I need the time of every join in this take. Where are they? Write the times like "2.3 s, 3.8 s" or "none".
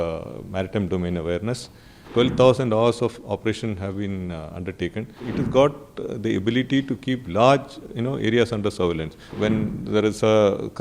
2.0 s, 5.2 s, 9.3 s